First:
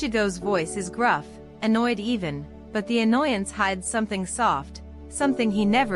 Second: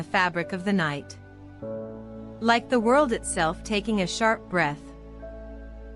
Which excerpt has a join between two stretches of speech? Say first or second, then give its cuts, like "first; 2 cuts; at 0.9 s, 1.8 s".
second; 2 cuts; at 1.0 s, 2.3 s